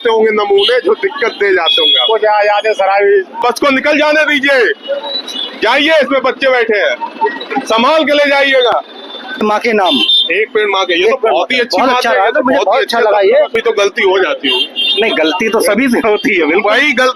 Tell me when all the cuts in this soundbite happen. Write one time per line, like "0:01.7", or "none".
0:03.4
0:09.4
0:13.6